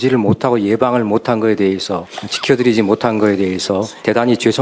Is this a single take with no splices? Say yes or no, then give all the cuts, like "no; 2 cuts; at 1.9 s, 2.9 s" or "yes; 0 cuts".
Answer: yes; 0 cuts